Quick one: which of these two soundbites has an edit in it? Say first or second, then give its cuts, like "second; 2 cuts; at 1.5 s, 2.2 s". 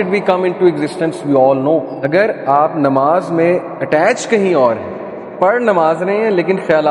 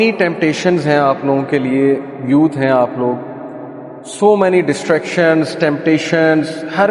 first; 1 cut; at 2.1 s